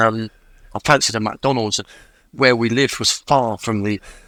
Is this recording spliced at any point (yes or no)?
no